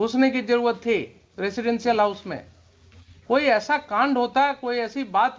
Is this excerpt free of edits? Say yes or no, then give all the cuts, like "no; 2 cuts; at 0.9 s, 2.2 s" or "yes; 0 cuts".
yes; 0 cuts